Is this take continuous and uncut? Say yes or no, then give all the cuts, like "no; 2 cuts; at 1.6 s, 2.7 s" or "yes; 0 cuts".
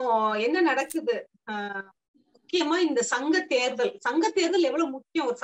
yes; 0 cuts